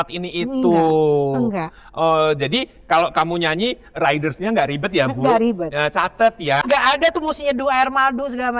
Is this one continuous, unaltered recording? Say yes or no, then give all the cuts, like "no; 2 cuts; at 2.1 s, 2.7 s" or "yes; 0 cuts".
no; 1 cut; at 6.6 s